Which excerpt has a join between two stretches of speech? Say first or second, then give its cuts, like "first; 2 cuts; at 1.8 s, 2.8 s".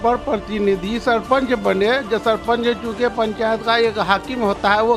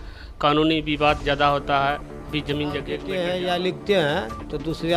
second; 1 cut; at 3.0 s